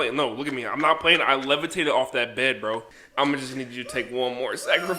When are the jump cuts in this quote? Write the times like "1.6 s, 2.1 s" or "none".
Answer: 3.0 s